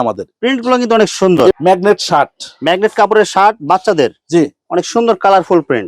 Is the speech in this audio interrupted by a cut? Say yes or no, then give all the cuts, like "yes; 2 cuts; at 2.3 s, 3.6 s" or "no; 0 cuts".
yes; 1 cut; at 1.5 s